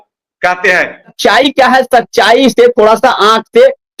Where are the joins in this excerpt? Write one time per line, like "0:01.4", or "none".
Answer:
0:01.1